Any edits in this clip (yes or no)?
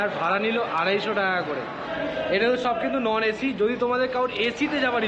no